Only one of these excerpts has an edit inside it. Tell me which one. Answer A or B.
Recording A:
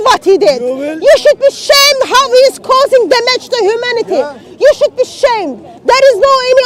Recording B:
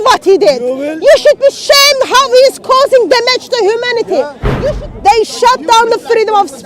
B